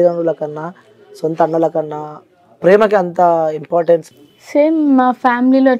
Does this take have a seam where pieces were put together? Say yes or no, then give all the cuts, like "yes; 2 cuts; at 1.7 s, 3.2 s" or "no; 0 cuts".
yes; 1 cut; at 4.1 s